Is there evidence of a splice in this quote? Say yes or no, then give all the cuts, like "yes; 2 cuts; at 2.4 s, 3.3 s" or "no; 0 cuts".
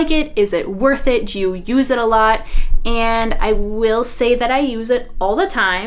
no; 0 cuts